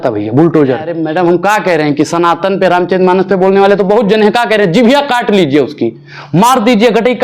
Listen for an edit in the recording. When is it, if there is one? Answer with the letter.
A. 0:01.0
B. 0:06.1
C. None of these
A